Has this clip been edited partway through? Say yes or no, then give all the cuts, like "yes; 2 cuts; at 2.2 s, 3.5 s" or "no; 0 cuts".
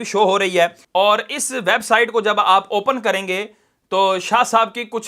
no; 0 cuts